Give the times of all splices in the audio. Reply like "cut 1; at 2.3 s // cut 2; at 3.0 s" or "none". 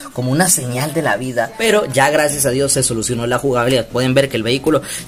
cut 1; at 1.6 s